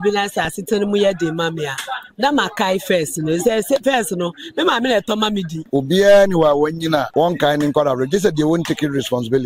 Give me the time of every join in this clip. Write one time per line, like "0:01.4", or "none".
0:05.5
0:07.1